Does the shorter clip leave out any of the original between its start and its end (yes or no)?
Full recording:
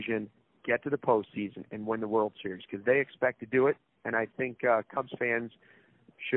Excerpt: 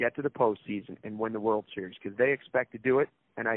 no